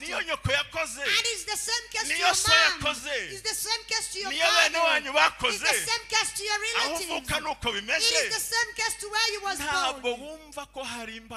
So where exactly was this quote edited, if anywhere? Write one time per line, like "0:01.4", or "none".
none